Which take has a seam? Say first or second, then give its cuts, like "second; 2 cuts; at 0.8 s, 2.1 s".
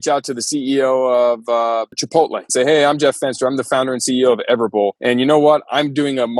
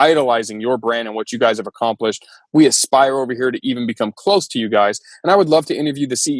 first; 2 cuts; at 2.5 s, 5.0 s